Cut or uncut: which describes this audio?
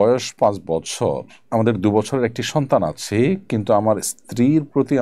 uncut